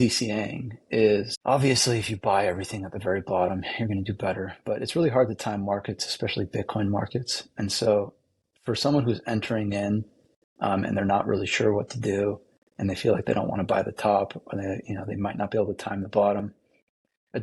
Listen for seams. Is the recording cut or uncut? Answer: cut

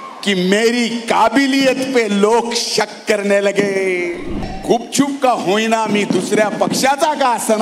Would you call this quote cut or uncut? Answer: cut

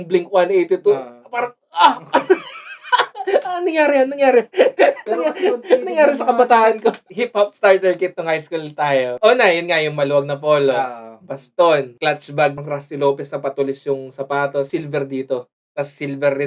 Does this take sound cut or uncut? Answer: cut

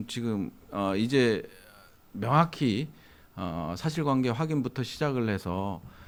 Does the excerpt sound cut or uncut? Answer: uncut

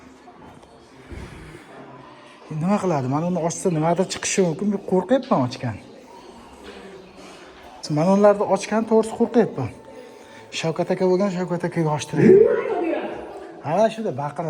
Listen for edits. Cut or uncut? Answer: cut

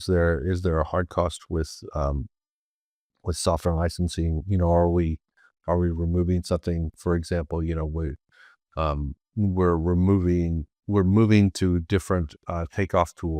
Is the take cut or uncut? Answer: uncut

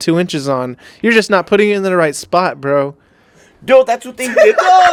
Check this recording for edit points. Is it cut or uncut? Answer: uncut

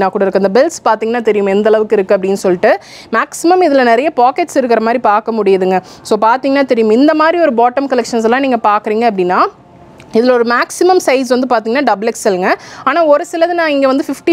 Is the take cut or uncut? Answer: uncut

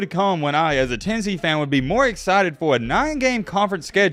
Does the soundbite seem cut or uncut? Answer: uncut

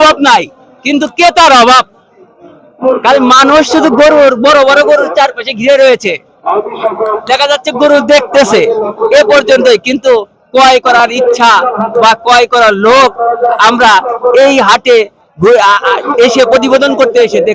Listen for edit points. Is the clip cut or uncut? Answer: uncut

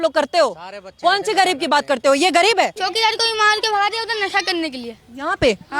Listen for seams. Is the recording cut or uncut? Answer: cut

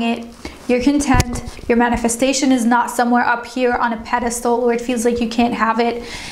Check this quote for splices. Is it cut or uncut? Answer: uncut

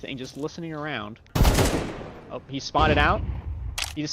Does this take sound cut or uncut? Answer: cut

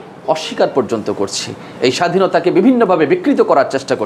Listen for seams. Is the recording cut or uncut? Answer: uncut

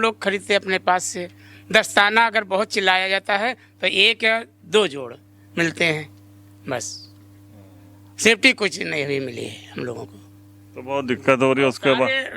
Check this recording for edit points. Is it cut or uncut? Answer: uncut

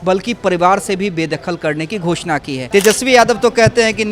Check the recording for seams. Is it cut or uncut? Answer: cut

